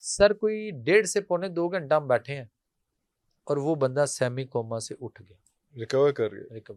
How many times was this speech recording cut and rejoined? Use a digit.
0